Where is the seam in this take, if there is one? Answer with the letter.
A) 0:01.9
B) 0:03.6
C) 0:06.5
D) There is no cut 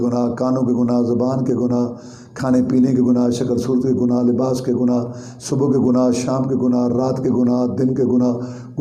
D